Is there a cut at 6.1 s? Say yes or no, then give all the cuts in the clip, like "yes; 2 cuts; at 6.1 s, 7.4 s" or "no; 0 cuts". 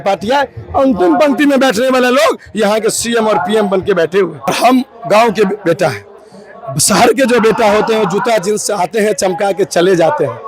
no; 1 cut; at 4.5 s